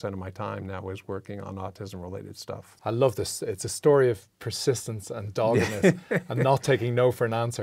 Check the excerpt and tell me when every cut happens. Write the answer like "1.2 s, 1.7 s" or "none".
2.7 s